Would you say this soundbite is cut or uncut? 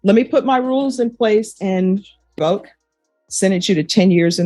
cut